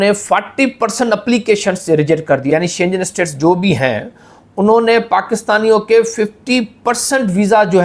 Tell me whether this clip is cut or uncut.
cut